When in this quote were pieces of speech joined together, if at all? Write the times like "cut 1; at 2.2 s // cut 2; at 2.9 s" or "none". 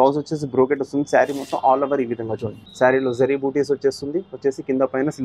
cut 1; at 2.6 s